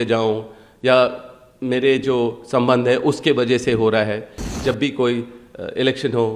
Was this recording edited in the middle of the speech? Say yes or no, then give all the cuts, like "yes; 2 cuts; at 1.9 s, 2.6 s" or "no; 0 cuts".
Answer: yes; 1 cut; at 4.4 s